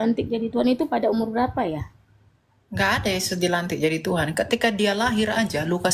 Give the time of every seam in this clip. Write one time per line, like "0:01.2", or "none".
none